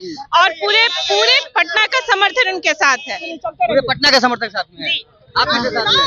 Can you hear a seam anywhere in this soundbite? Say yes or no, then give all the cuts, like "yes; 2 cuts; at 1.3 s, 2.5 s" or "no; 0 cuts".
no; 0 cuts